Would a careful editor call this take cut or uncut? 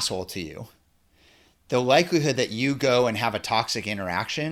uncut